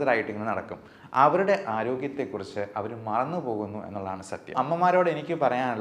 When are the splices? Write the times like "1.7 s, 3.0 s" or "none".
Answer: 4.5 s